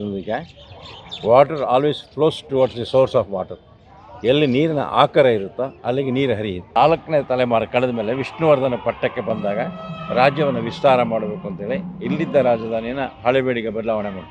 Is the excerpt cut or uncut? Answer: cut